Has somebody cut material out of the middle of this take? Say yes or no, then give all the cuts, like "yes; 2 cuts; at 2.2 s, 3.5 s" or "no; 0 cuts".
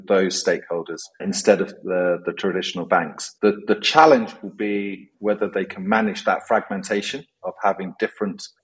no; 0 cuts